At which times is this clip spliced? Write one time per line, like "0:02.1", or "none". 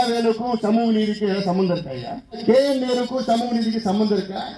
0:02.4